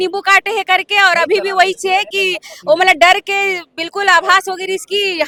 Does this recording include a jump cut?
no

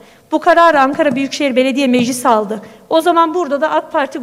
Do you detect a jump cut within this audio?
no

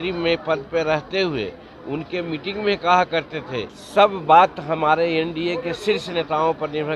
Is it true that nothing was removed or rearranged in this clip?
no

